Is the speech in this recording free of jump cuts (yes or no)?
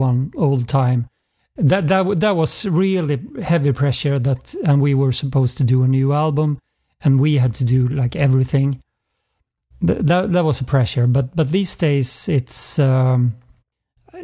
yes